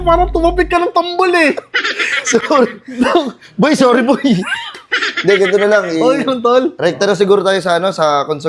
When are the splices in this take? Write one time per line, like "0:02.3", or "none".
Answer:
none